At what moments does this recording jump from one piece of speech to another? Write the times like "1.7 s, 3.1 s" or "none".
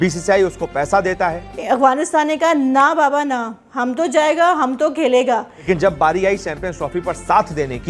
1.5 s, 5.6 s